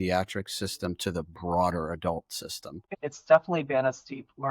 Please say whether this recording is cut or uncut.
cut